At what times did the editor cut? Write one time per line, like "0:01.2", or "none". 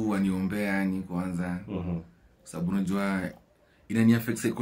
none